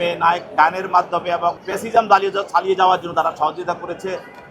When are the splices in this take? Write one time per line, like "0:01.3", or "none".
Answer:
0:01.7